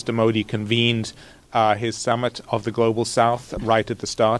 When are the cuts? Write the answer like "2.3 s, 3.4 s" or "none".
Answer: none